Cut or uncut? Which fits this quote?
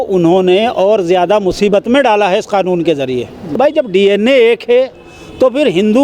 cut